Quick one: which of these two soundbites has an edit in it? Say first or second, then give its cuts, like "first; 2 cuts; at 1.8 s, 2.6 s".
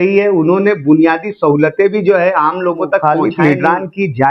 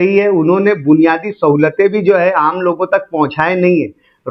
first; 1 cut; at 3.0 s